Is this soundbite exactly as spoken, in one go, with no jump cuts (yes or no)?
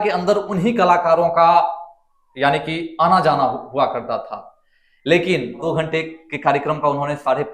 no